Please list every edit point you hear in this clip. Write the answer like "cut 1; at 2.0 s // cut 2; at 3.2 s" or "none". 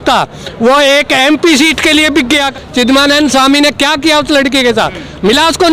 cut 1; at 2.5 s